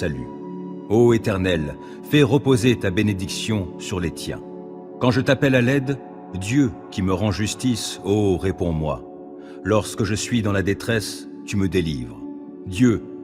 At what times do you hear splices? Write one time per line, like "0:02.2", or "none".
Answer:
0:04.8